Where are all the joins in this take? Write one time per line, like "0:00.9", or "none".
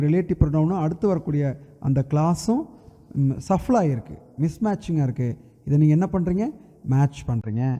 none